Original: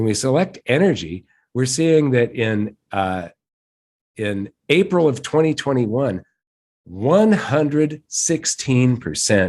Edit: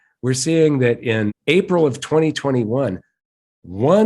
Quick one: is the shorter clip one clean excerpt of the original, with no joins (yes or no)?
no